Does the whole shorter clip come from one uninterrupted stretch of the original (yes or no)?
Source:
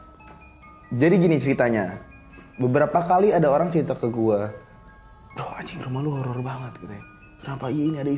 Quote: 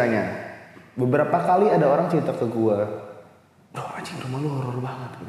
yes